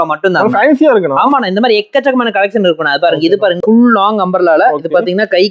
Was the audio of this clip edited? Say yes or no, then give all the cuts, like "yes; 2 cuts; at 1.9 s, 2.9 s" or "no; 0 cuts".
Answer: yes; 1 cut; at 3.6 s